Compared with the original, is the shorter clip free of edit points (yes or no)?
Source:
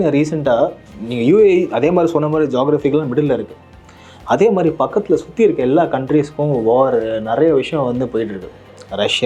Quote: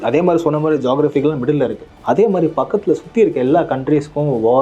no